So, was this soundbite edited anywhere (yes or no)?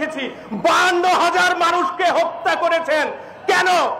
no